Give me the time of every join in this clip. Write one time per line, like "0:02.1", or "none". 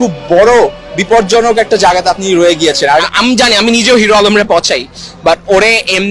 0:03.1